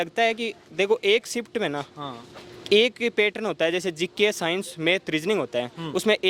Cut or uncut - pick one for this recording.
uncut